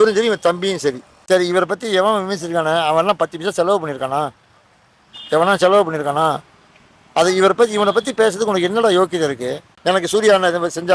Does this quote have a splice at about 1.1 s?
yes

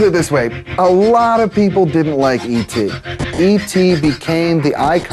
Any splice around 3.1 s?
yes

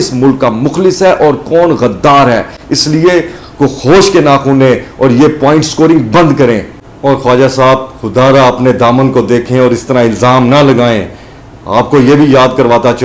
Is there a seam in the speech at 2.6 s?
no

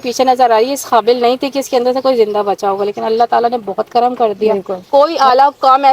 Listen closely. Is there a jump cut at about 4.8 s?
yes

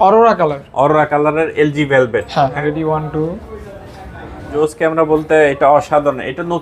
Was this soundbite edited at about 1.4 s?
no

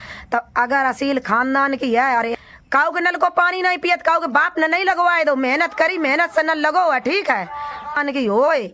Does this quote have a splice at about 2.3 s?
yes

